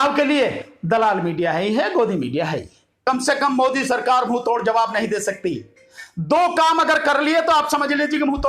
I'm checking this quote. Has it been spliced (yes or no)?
yes